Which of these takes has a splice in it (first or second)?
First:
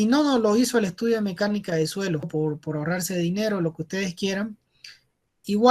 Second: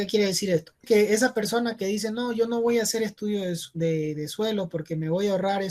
first